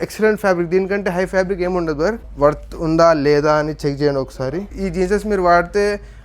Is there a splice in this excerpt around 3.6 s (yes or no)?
no